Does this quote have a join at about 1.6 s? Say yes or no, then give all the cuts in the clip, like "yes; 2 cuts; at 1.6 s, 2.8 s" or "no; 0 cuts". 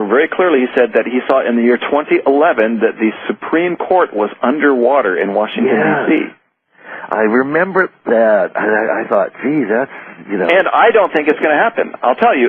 yes; 1 cut; at 1.6 s